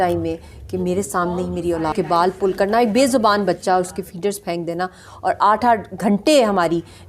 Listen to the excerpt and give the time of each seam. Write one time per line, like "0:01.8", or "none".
0:01.9